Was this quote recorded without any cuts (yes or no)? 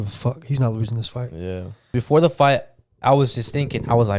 no